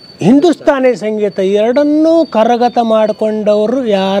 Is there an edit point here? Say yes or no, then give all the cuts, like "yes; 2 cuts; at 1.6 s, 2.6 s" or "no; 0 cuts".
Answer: no; 0 cuts